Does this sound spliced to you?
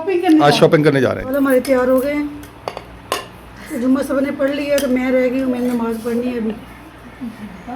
yes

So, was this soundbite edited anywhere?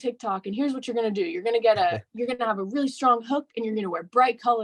no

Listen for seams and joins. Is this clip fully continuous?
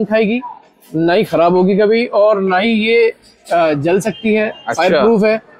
yes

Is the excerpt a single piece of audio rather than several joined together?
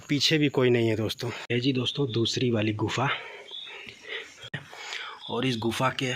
no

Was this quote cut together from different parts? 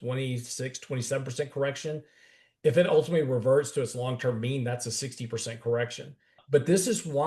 yes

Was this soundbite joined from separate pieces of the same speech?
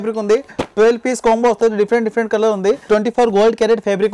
yes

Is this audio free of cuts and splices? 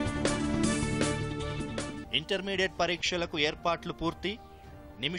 no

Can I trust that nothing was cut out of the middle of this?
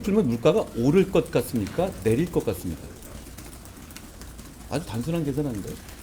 yes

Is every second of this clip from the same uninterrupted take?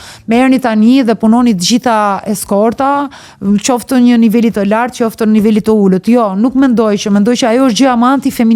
yes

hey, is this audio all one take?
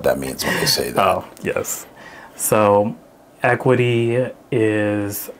yes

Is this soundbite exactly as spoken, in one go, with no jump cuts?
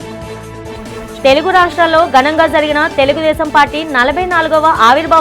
yes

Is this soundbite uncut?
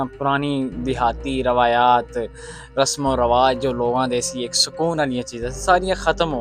yes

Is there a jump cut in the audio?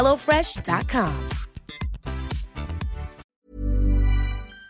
yes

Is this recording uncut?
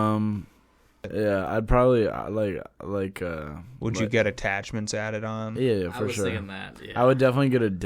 no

